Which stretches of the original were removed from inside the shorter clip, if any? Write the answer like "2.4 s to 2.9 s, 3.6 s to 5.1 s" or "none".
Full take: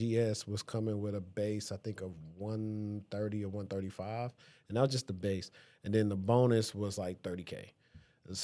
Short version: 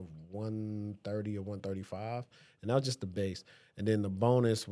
none